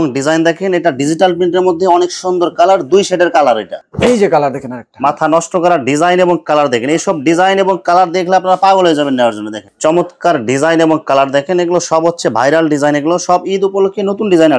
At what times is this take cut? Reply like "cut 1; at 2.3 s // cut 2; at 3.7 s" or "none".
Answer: cut 1; at 3.8 s // cut 2; at 9.7 s